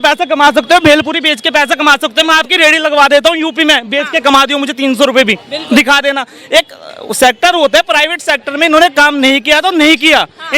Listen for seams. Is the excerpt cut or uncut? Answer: uncut